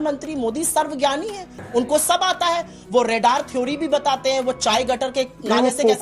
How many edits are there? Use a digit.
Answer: 1